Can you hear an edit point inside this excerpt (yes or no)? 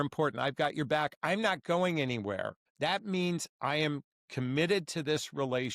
yes